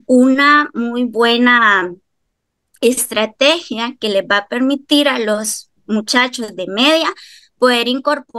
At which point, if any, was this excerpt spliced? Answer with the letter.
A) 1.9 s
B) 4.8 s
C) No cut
C